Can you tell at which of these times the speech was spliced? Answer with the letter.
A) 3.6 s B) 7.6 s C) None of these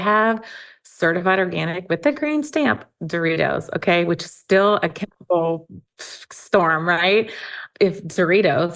B